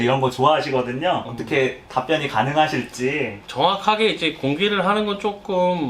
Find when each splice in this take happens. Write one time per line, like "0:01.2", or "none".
0:03.4